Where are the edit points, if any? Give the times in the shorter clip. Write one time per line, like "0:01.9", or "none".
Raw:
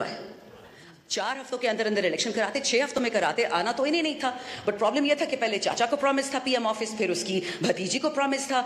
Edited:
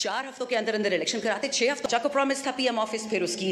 0:01.9